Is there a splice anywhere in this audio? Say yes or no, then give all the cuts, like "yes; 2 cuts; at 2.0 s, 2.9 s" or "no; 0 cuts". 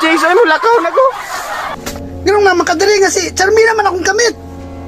no; 0 cuts